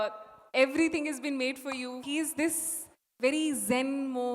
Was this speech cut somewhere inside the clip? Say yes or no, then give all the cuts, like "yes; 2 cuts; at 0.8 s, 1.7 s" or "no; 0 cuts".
yes; 1 cut; at 2.0 s